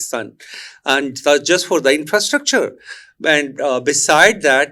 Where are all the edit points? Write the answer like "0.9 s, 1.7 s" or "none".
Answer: none